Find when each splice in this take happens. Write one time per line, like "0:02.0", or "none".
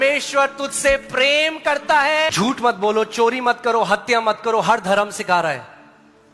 0:02.3